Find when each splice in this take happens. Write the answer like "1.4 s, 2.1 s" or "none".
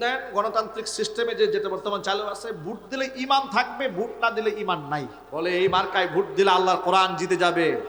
5.2 s